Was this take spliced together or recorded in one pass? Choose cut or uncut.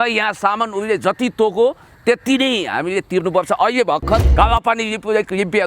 cut